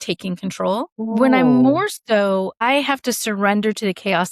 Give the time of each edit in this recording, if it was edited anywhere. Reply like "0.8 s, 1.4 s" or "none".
1.1 s, 2.6 s

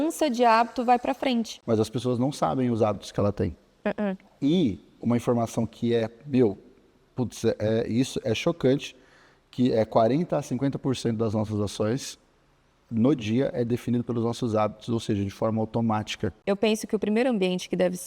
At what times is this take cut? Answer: 1.5 s, 16.3 s

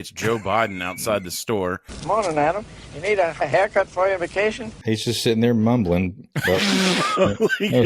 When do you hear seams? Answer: 4.7 s

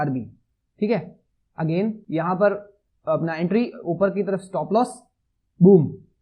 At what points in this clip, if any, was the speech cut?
2.0 s

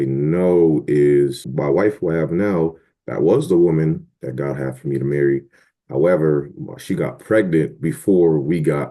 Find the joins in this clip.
1.4 s

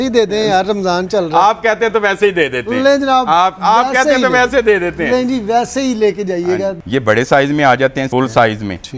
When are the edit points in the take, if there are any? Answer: 6.8 s, 8.1 s

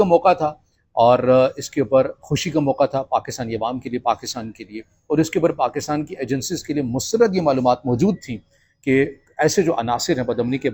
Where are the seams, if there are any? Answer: none

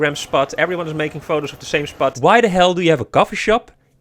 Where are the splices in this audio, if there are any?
2.2 s

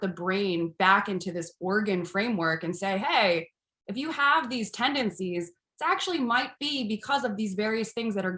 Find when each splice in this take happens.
none

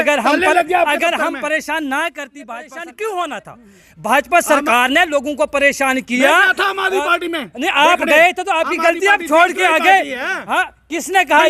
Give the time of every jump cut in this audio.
2.4 s

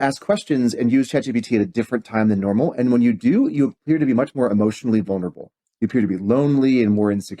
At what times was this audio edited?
none

